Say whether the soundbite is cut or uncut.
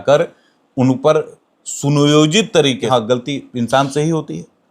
cut